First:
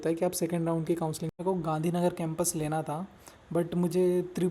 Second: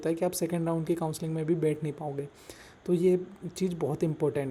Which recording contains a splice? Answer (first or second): first